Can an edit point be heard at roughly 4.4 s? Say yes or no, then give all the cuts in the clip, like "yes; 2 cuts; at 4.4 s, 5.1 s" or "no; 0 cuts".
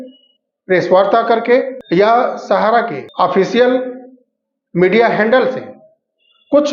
no; 0 cuts